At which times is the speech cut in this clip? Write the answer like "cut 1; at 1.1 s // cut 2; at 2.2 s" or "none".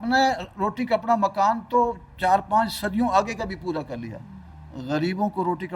none